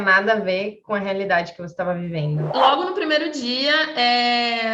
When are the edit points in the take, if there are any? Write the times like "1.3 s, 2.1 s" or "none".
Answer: 2.5 s